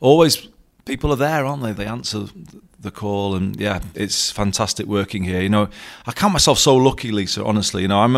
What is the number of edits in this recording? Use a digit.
0